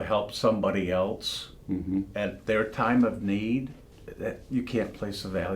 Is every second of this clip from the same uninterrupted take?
no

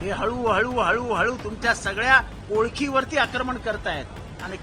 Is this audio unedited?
yes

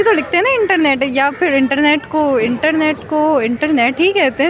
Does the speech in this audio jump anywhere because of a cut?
no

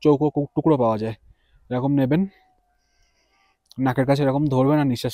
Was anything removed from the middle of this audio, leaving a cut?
no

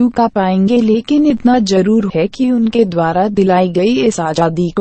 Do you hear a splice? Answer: no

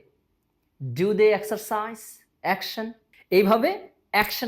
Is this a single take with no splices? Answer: no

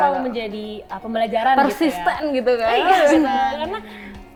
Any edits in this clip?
no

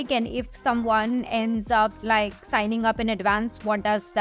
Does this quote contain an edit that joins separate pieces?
no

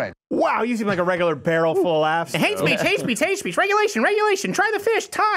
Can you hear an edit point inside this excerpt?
yes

